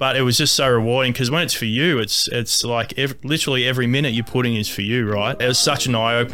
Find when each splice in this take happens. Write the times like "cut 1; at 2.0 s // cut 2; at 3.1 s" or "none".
cut 1; at 5.4 s